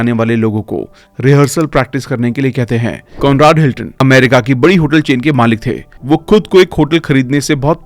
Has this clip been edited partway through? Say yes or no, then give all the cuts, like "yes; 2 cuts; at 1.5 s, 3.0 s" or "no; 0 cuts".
yes; 1 cut; at 3.1 s